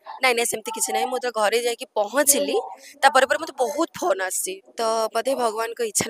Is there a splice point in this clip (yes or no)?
yes